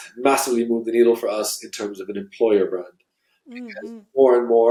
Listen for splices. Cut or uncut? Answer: uncut